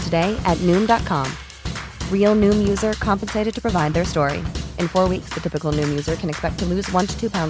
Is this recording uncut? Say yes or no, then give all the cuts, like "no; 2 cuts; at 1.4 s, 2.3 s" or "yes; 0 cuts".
yes; 0 cuts